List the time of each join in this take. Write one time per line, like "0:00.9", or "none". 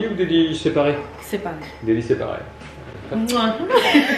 0:01.1

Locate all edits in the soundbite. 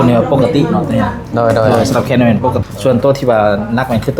0:02.6

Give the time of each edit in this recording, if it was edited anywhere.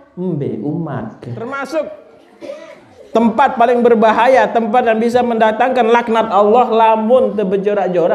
0:01.4

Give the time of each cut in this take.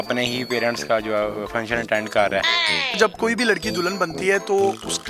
0:02.5

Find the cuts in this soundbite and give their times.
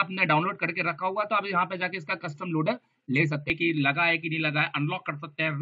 0:03.5

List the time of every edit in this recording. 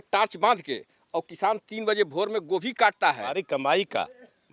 0:03.3

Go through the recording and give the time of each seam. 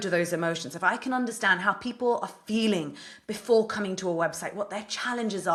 none

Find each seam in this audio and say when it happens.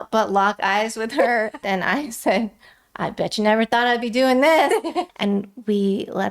0:01.6
0:05.0

